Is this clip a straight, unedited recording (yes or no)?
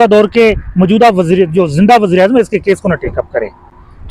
yes